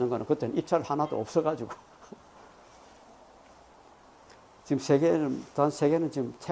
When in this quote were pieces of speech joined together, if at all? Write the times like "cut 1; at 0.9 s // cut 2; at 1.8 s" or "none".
cut 1; at 1.1 s